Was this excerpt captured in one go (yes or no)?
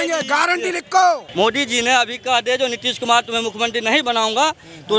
no